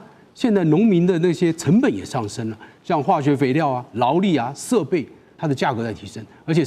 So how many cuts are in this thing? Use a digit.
1